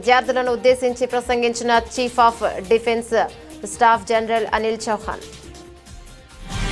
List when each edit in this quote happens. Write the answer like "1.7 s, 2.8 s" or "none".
5.2 s